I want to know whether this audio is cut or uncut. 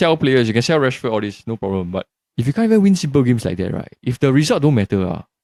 uncut